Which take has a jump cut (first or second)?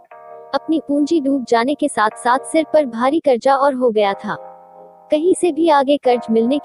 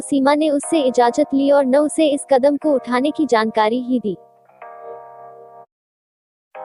second